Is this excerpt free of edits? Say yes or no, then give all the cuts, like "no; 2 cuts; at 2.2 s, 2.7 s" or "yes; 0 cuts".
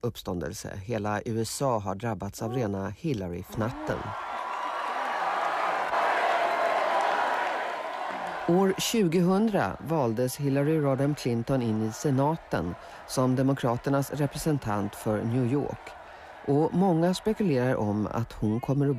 no; 1 cut; at 16.8 s